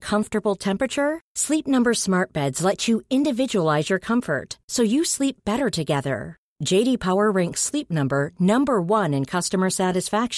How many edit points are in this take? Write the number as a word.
zero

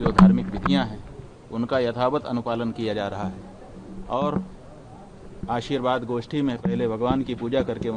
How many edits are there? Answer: zero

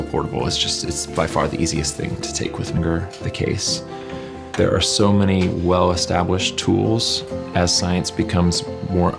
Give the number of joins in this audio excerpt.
zero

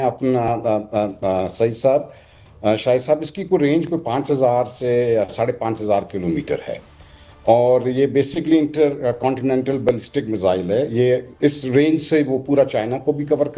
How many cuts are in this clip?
zero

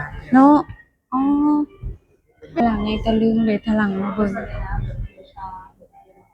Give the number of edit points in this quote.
one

